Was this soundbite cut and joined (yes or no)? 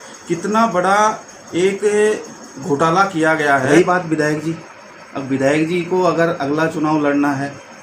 yes